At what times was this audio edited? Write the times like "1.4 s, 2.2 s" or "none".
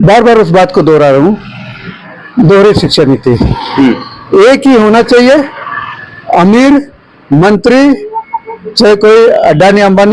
none